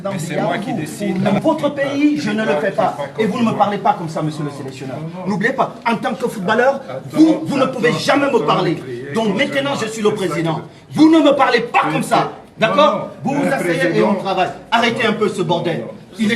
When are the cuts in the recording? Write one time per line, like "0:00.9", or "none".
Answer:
0:01.4